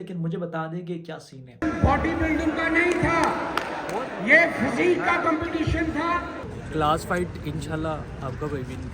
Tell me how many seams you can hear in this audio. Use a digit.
2